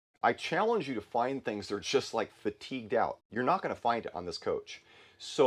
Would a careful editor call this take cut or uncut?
uncut